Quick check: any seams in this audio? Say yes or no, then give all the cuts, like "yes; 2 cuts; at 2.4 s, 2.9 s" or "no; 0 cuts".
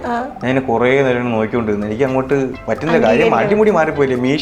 yes; 1 cut; at 2.6 s